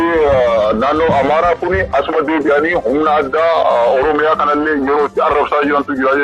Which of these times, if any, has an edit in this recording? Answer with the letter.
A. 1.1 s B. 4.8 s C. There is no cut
C